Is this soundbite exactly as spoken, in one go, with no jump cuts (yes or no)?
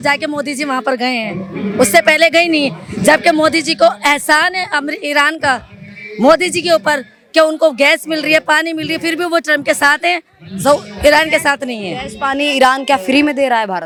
yes